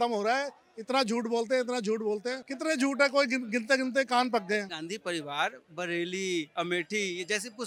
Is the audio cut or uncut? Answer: uncut